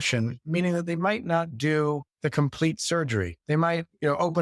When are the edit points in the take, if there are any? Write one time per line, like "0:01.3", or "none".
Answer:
0:02.1
0:03.4